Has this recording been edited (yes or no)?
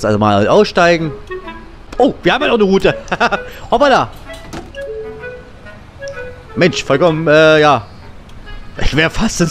yes